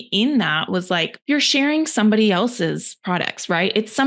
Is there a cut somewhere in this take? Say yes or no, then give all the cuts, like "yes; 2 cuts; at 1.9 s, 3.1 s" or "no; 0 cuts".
yes; 1 cut; at 1.1 s